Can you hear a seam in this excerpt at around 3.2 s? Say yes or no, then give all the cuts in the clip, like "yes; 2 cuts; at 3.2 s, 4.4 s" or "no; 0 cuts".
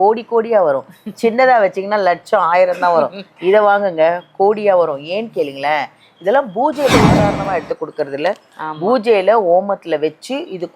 no; 1 cut; at 7.2 s